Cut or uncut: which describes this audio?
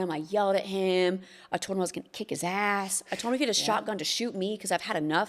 uncut